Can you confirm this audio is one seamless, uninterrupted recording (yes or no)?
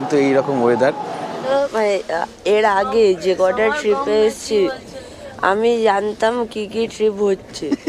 no